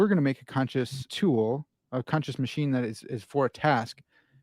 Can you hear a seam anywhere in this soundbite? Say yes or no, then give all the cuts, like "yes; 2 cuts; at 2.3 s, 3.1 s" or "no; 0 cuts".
yes; 1 cut; at 1.0 s